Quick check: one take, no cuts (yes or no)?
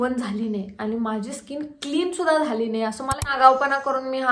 no